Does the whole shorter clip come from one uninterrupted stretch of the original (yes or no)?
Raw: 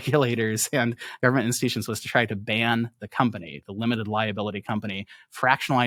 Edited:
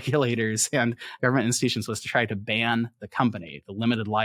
yes